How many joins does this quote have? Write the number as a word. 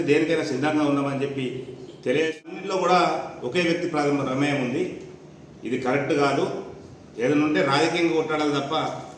one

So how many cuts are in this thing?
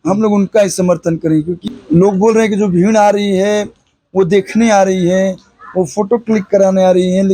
one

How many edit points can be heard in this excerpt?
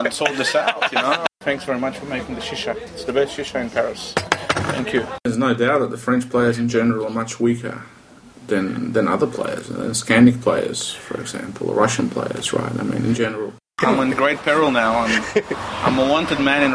three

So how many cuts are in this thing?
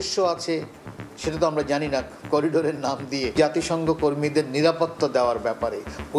one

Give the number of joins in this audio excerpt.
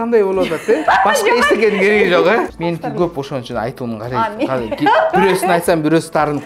one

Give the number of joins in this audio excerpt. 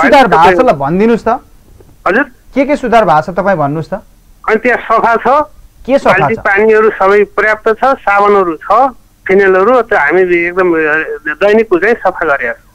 zero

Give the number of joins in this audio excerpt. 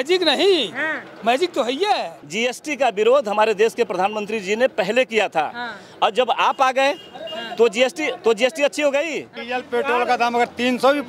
two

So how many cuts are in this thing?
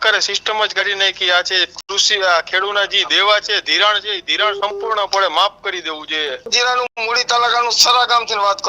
one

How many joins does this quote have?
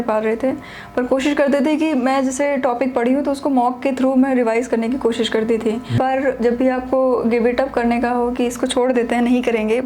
one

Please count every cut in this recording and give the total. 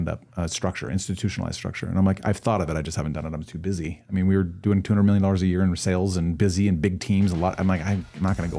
zero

